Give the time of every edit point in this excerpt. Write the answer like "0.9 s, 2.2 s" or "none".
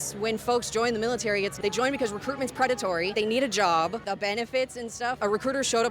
1.5 s, 3.1 s, 4.1 s, 5.2 s